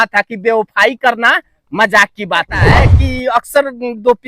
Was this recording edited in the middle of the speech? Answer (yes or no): yes